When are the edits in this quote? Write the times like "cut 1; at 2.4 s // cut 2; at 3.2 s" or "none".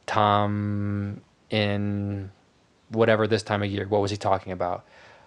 none